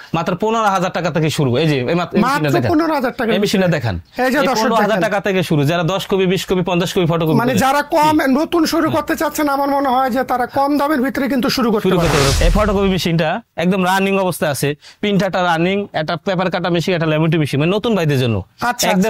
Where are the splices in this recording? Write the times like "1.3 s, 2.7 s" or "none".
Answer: 12.3 s